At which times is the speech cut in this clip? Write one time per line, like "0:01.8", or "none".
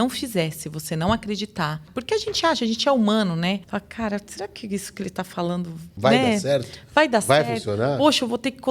0:01.9
0:03.6
0:05.8